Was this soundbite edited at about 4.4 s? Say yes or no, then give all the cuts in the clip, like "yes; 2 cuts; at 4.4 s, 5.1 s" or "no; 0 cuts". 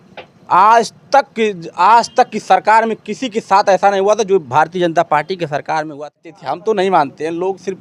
no; 1 cut; at 6.2 s